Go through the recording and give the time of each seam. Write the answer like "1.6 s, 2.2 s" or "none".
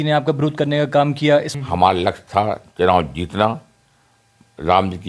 1.5 s